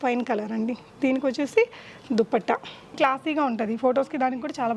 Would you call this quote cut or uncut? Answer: cut